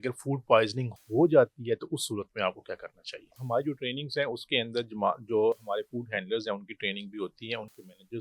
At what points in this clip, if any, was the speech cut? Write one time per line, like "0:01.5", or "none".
0:03.4